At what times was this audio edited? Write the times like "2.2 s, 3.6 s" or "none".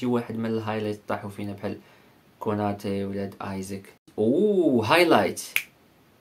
4.0 s